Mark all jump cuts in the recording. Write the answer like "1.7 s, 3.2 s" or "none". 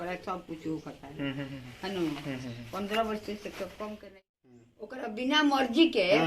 4.1 s